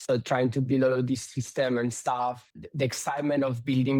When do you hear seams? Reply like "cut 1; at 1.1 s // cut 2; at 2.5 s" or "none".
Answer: cut 1; at 2.5 s